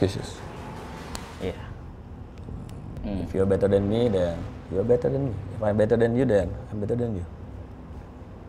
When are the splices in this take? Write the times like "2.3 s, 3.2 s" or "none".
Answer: 1.3 s, 2.9 s